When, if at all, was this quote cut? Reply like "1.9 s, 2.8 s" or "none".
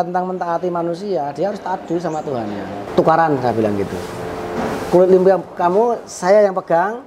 2.9 s